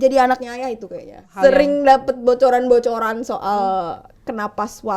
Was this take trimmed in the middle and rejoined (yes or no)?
yes